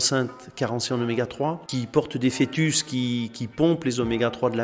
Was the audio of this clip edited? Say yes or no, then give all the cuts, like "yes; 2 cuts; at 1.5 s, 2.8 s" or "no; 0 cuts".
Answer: yes; 1 cut; at 1.6 s